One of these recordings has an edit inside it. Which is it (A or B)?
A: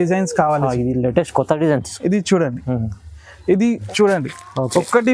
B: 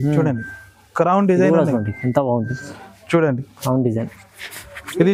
A